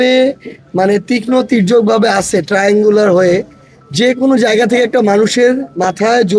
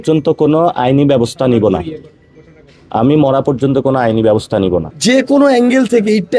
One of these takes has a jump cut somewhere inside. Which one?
second; 1 cut; at 4.9 s

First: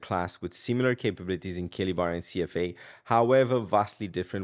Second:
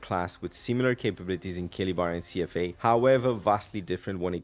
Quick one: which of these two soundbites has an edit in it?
second; 1 cut; at 2.7 s

